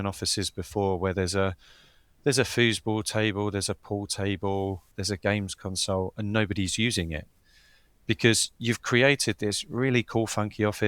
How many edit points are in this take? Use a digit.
1